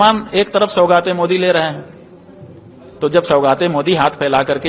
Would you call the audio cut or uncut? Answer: uncut